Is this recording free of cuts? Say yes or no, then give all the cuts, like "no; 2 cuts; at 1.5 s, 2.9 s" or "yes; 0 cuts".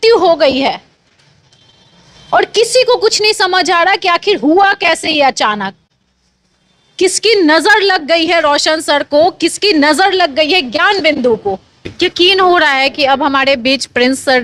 no; 1 cut; at 11.8 s